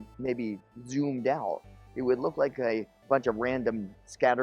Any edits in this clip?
yes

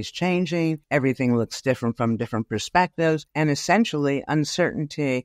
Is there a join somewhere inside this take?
yes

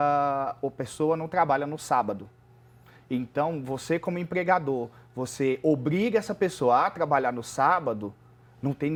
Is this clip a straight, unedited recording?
yes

